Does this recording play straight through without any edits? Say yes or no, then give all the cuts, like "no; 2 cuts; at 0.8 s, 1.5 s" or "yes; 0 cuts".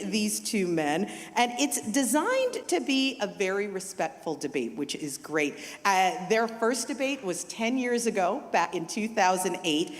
no; 1 cut; at 8.7 s